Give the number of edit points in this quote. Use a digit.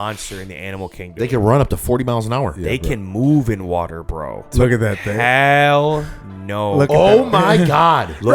1